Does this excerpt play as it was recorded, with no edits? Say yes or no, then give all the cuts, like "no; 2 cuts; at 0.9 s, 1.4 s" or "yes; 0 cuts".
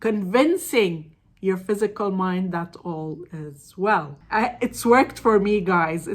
no; 1 cut; at 4.2 s